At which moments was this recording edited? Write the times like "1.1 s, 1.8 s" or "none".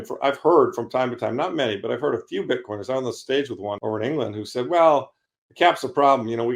3.8 s